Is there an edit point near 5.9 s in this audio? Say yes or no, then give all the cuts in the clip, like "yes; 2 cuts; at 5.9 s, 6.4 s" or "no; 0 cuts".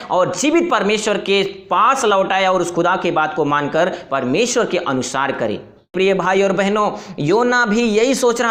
yes; 1 cut; at 5.9 s